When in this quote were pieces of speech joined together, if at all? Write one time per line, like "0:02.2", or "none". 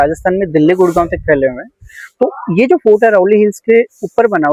none